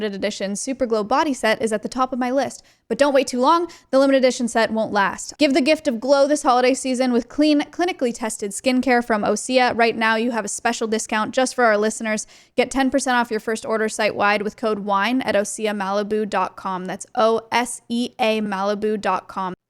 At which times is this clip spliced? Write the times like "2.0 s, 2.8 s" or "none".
5.2 s